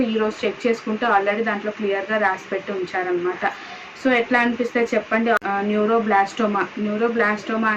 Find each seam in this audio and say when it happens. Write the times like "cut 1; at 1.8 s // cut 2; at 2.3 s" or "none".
cut 1; at 5.4 s